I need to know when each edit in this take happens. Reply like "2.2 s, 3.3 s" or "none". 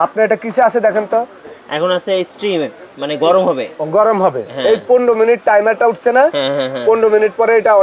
none